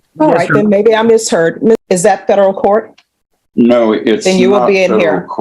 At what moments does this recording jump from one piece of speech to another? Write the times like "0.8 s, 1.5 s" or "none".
1.8 s

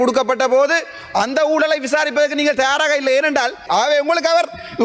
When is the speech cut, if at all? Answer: 3.6 s

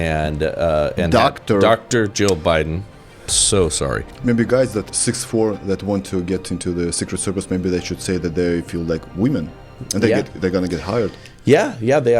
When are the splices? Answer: 4.1 s, 4.9 s

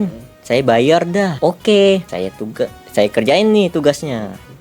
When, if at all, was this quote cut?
1.3 s, 2.1 s

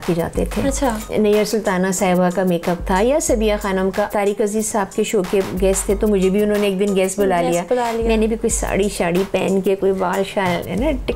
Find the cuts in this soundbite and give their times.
1.1 s, 4.1 s

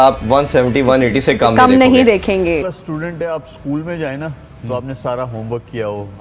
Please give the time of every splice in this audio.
2.7 s

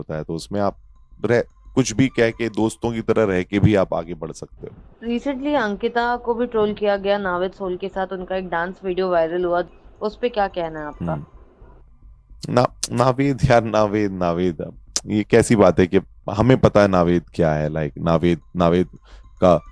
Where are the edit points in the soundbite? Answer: none

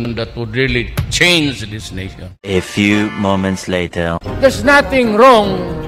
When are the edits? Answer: 2.5 s

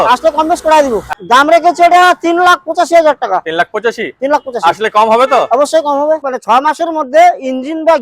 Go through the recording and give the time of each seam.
1.2 s, 6.3 s

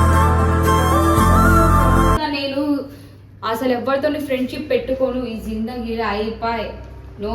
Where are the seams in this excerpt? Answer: 2.2 s

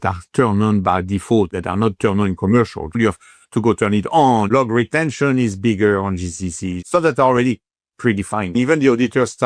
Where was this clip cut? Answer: 1.5 s, 3.0 s, 4.5 s, 6.7 s, 8.5 s

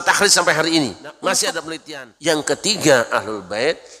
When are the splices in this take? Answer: 1.7 s

